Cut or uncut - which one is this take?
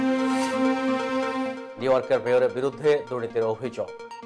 cut